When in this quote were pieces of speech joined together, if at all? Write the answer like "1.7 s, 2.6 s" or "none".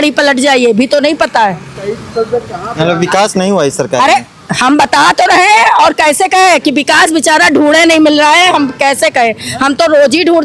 none

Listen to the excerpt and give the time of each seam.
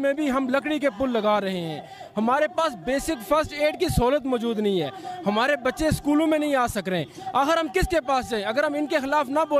none

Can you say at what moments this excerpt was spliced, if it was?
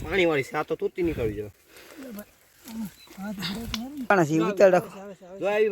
4.1 s

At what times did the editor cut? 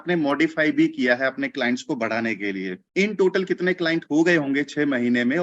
2.8 s

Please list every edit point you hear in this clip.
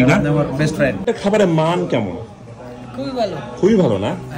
1.0 s

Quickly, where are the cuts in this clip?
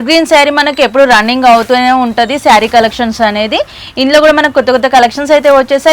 none

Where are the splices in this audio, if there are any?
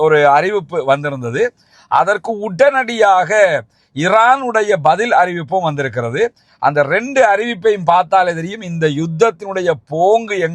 none

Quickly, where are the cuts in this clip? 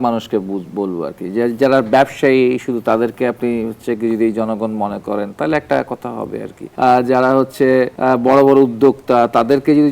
6.6 s, 7.9 s

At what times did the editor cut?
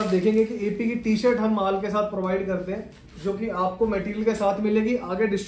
none

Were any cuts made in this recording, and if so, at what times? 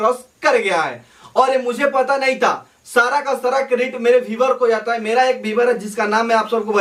none

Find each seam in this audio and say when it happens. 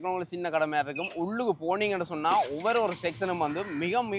none

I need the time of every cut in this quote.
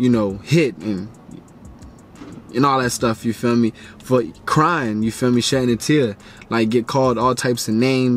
none

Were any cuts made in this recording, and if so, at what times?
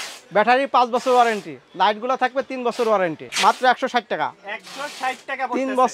3.3 s

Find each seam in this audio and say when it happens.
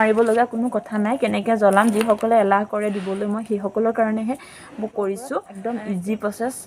5.5 s

